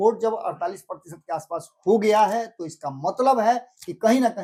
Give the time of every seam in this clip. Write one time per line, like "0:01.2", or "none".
none